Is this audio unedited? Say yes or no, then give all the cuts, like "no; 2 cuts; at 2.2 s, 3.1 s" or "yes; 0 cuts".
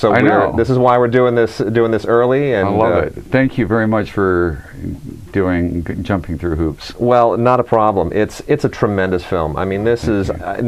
no; 1 cut; at 7.1 s